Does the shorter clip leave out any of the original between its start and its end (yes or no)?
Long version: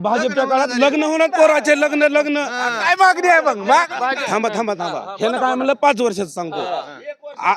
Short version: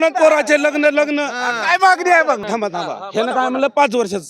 yes